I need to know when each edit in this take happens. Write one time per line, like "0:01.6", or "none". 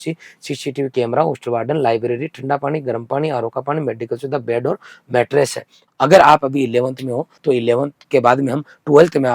0:05.8
0:07.5